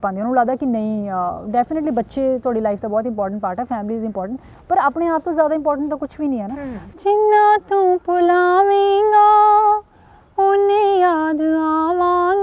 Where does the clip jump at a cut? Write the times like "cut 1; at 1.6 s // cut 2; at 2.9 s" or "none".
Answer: cut 1; at 6.8 s